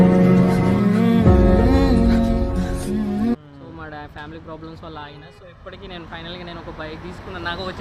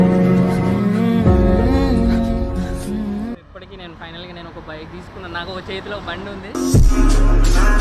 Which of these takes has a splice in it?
second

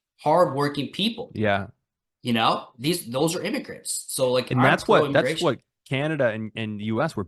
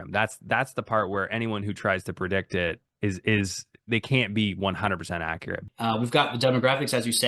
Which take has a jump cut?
second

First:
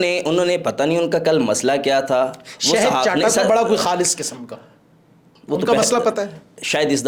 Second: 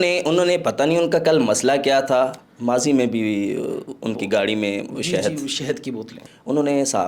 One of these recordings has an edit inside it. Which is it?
second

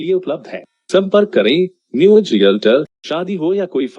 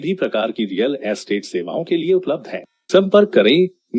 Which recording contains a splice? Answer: first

